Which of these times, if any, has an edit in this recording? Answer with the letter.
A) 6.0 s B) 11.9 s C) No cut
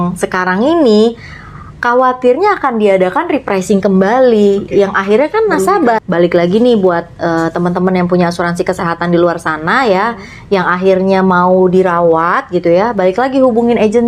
A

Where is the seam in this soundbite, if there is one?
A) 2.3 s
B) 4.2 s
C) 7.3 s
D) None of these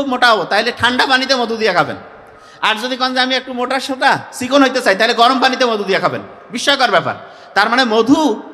D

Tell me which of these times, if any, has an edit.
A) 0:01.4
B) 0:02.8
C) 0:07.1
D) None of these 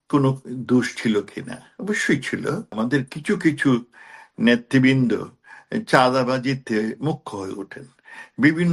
B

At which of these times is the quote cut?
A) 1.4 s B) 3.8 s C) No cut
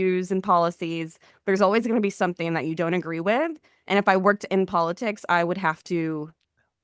C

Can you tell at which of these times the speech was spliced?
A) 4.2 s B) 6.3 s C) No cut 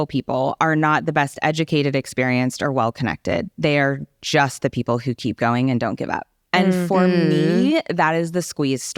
C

